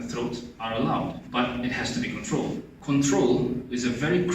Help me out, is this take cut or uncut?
cut